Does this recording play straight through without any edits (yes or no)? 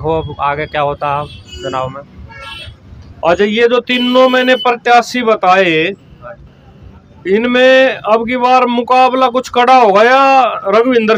yes